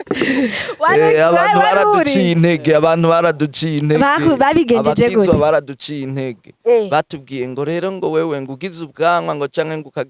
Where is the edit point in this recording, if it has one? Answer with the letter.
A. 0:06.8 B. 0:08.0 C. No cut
C